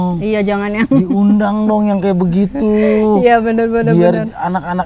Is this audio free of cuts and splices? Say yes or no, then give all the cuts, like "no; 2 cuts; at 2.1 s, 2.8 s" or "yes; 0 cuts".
yes; 0 cuts